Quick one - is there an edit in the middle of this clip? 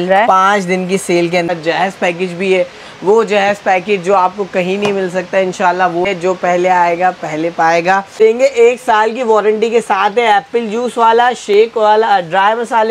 yes; 3 cuts; at 1.5 s, 6.1 s, 8.2 s

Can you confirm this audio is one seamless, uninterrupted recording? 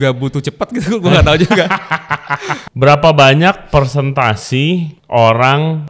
no; 2 cuts; at 2.6 s, 4.9 s

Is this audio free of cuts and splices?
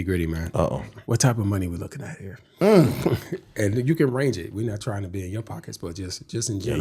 no; 1 cut; at 0.9 s

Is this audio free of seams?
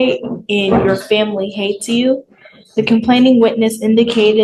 yes; 0 cuts

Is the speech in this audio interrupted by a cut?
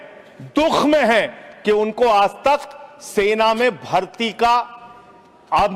no; 0 cuts

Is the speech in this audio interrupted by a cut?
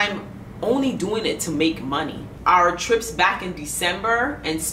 yes; 1 cut; at 2.3 s

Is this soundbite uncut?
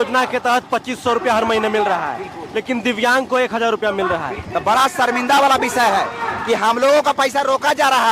no; 1 cut; at 4.4 s

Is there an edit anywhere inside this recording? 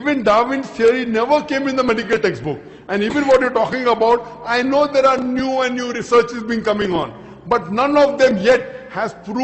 no; 0 cuts

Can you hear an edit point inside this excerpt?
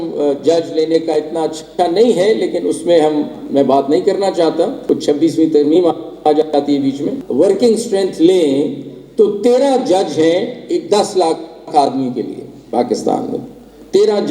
yes; 2 cuts; at 4.8 s, 7.2 s

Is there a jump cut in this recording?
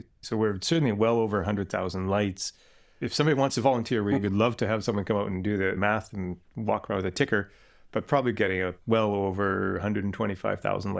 no; 0 cuts

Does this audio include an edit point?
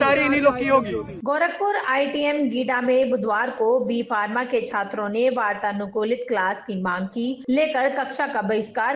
yes; 1 cut; at 1.0 s

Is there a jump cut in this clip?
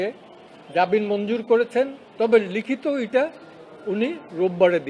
no; 0 cuts

